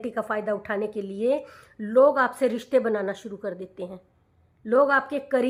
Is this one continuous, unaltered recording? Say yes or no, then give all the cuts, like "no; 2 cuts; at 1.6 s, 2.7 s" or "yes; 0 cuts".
yes; 0 cuts